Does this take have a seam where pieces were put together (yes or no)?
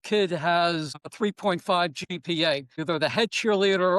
yes